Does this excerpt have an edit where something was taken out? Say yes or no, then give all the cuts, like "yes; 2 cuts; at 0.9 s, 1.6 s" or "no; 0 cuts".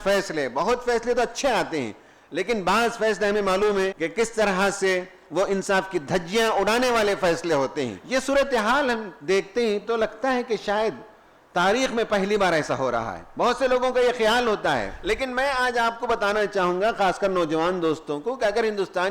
yes; 3 cuts; at 4.0 s, 8.0 s, 14.9 s